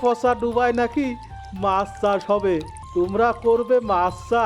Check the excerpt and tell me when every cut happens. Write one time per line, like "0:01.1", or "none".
0:02.8